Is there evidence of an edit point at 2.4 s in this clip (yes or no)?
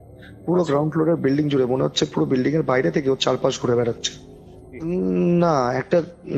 no